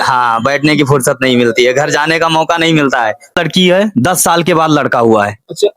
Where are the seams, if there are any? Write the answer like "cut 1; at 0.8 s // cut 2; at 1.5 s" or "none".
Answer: cut 1; at 3.3 s